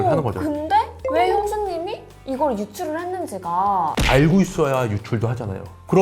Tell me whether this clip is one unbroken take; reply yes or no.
no